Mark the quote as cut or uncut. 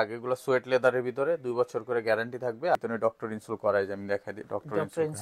cut